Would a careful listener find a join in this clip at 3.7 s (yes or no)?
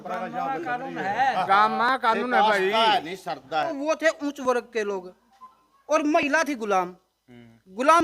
yes